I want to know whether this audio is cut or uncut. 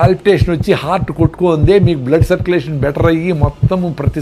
uncut